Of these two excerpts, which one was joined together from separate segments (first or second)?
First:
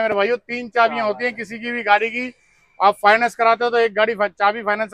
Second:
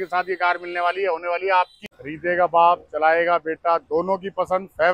second